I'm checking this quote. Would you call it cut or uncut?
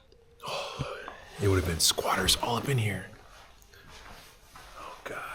uncut